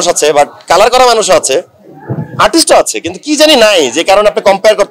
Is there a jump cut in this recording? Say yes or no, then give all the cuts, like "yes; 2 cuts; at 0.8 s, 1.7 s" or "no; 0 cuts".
no; 0 cuts